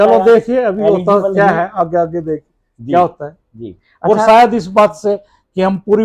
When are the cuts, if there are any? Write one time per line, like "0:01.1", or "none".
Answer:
none